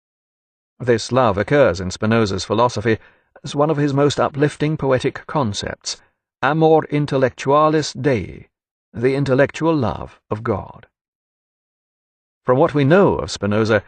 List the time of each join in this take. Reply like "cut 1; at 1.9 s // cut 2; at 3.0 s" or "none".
none